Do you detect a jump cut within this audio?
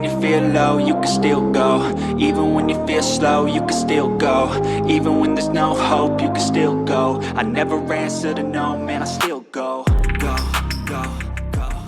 no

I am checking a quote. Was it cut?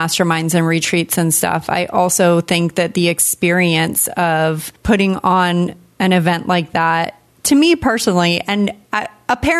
no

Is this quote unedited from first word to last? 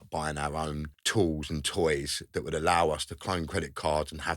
no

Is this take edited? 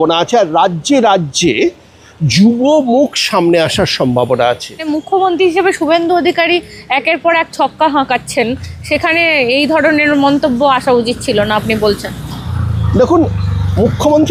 no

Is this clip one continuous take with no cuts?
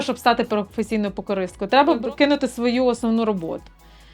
no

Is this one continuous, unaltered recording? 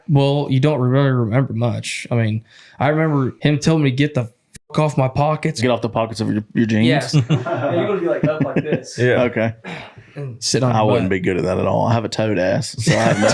no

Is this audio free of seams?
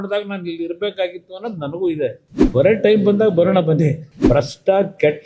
no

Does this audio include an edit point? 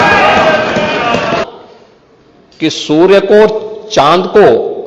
yes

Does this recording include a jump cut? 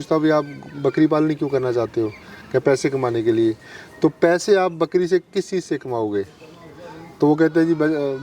no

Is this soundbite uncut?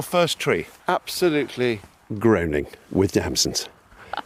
yes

